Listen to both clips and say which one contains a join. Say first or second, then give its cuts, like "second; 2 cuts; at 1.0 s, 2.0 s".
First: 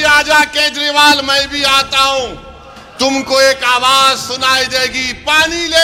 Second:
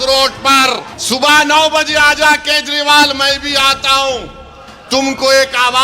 second; 1 cut; at 0.9 s